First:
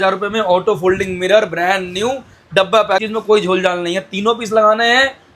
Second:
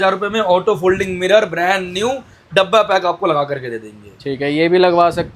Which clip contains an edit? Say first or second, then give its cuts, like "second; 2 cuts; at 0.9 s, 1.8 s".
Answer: first; 1 cut; at 3.0 s